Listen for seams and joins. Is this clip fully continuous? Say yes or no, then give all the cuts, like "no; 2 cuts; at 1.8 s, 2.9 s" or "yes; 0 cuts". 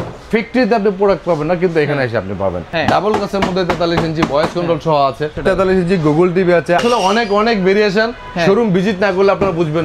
no; 3 cuts; at 2.7 s, 5.4 s, 6.8 s